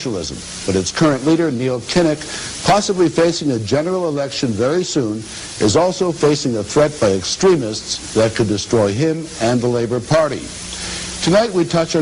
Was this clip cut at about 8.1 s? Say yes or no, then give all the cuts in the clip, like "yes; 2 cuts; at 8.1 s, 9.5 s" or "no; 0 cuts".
no; 1 cut; at 1.0 s